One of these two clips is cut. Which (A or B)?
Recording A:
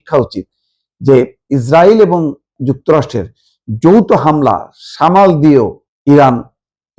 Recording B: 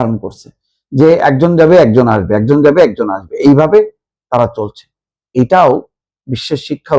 A